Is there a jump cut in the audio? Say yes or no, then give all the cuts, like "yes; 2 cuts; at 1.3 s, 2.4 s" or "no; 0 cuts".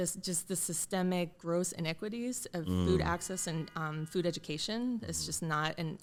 no; 0 cuts